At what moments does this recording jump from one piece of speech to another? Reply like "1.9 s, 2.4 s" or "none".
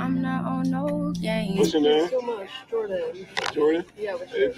1.3 s